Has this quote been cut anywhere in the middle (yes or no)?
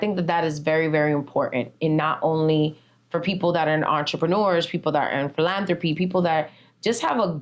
no